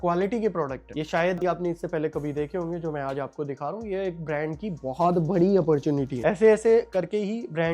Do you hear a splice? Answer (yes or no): no